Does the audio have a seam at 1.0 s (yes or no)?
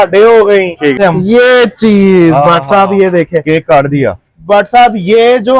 yes